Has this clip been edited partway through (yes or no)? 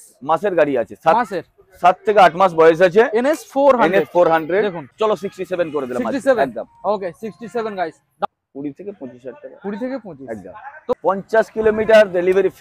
yes